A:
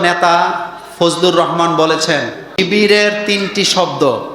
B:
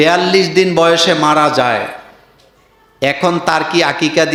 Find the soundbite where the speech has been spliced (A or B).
A